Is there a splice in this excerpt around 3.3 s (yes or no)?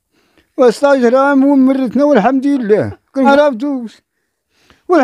yes